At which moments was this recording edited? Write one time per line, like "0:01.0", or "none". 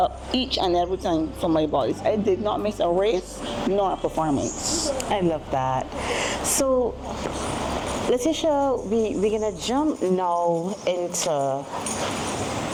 none